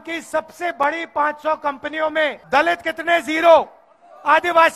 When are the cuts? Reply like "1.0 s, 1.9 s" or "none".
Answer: 2.4 s